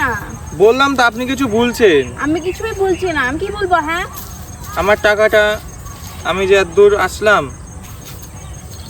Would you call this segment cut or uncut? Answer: uncut